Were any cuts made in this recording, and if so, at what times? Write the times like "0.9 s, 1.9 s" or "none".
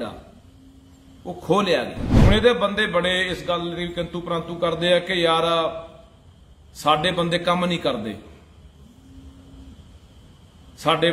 2.0 s